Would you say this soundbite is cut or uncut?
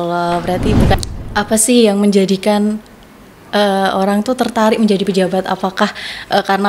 cut